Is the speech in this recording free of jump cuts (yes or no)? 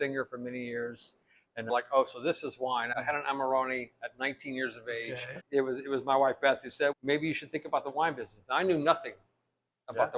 no